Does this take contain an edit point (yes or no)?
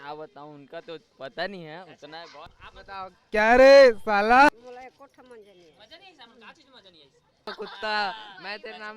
yes